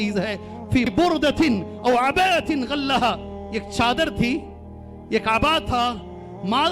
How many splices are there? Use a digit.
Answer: 1